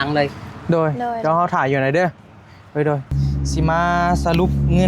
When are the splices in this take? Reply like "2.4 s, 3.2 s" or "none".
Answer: 3.1 s